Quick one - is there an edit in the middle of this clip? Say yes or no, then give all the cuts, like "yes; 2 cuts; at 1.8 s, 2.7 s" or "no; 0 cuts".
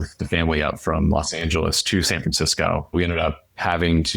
yes; 1 cut; at 2.9 s